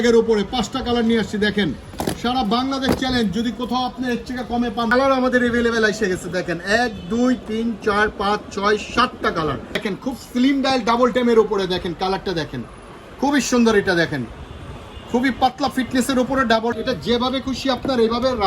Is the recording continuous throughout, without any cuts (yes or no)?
no